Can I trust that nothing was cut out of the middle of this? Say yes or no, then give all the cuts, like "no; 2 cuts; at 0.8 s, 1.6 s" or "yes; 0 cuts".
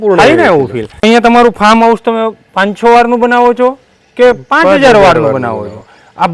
no; 1 cut; at 1.0 s